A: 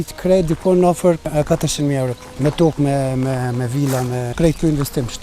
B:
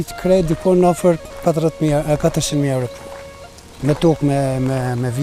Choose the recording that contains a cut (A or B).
A